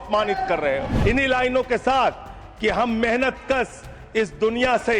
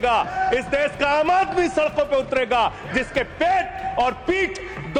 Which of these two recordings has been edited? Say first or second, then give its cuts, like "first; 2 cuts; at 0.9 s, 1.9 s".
first; 1 cut; at 0.9 s